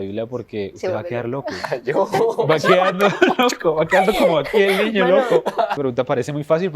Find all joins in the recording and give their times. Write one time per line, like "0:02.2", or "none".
0:05.7